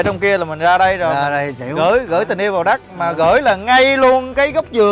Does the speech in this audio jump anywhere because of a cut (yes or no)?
no